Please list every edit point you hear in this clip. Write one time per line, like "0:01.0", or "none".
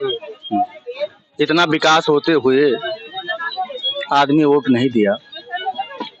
none